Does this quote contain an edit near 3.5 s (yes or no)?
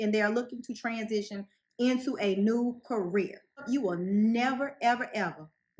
yes